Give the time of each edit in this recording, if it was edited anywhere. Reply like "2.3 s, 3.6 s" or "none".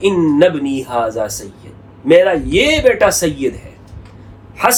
none